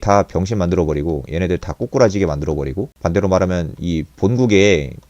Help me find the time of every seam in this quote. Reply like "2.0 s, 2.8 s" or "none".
none

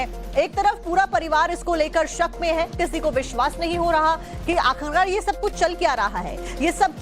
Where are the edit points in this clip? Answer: 1.9 s

